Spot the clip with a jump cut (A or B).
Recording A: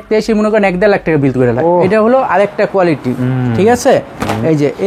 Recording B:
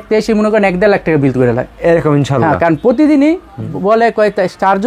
A